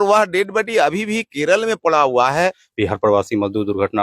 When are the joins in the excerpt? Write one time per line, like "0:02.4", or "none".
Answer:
0:02.6